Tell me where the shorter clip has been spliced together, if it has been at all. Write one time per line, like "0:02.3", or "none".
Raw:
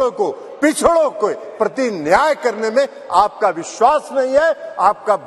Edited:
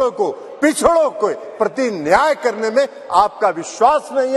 none